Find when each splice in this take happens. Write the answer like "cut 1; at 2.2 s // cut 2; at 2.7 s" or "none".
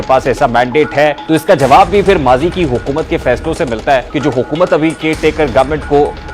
cut 1; at 1.2 s // cut 2; at 4.1 s

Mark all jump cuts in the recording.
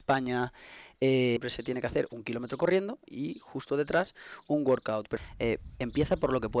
cut 1; at 1.4 s // cut 2; at 5.1 s

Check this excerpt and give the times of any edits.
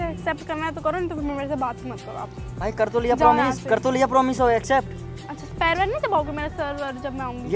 none

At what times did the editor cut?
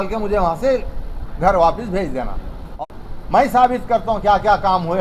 cut 1; at 2.7 s

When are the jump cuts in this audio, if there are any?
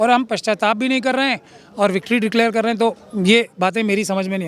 none

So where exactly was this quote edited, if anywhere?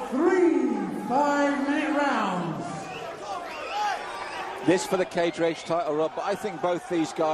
cut 1; at 1.6 s

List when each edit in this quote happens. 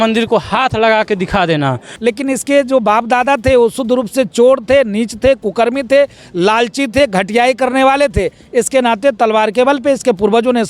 cut 1; at 1.9 s

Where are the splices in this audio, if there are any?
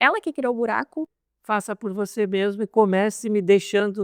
cut 1; at 1.2 s

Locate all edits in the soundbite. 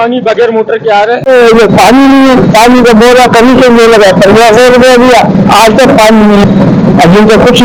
none

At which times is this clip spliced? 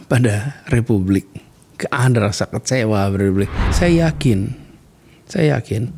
cut 1; at 3.6 s

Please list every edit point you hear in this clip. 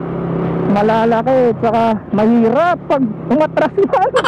none

